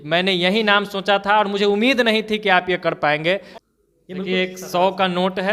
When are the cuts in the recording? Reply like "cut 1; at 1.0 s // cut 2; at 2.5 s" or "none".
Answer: cut 1; at 3.5 s